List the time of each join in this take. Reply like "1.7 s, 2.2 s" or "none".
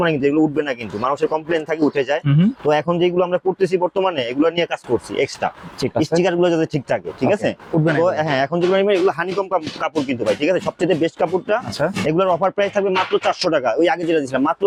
none